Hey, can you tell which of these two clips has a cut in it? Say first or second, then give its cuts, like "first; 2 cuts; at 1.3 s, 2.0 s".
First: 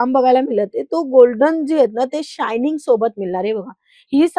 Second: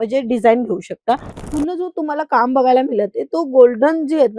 second; 1 cut; at 1.4 s